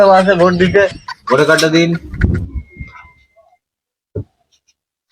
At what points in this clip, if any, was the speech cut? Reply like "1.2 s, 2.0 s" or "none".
1.1 s